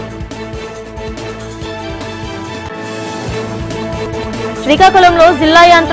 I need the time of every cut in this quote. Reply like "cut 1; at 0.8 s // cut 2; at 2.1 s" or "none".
none